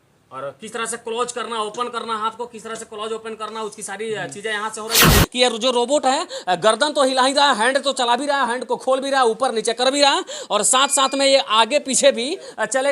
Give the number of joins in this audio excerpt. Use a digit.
1